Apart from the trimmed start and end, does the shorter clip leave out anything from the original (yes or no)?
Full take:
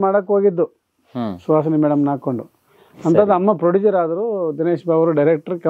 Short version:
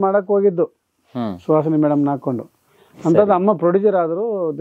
no